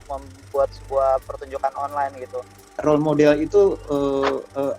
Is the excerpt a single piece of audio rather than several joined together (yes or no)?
no